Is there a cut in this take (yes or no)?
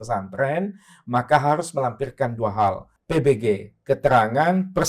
yes